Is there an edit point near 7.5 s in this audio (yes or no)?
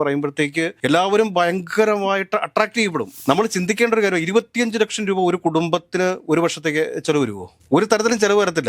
yes